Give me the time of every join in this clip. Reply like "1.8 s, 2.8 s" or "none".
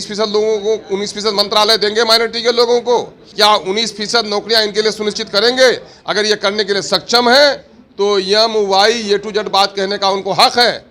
3.2 s